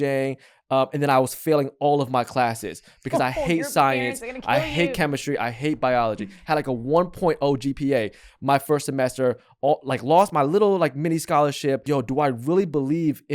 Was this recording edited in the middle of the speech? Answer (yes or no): yes